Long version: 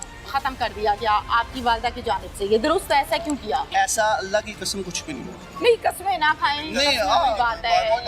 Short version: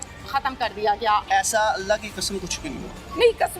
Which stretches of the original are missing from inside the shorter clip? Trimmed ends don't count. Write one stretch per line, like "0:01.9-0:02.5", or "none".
0:01.2-0:03.7